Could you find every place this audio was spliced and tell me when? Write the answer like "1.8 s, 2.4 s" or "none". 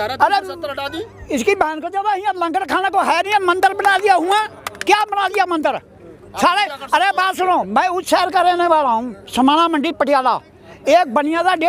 none